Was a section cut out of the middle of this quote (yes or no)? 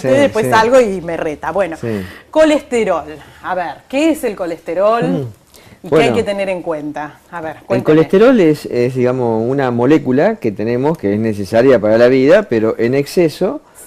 yes